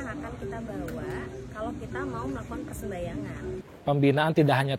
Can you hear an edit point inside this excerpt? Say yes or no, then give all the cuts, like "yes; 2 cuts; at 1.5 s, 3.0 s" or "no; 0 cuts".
yes; 1 cut; at 3.6 s